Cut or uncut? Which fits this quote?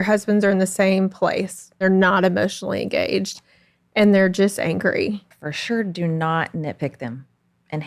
cut